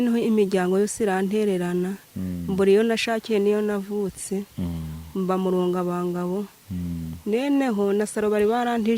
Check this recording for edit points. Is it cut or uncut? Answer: uncut